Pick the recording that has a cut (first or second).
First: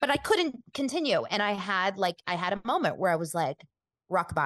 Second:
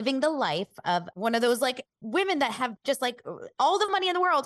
second